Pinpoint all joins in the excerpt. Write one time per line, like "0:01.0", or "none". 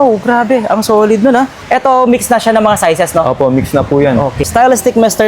0:01.6
0:04.5